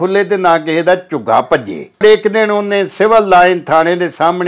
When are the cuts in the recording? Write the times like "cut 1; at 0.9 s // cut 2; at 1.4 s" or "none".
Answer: cut 1; at 2.0 s